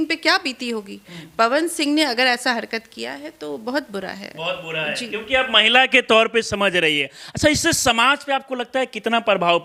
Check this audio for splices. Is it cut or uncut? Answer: uncut